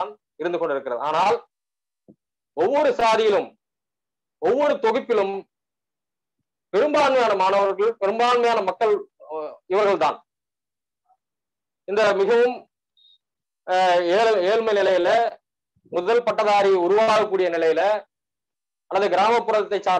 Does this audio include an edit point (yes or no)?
no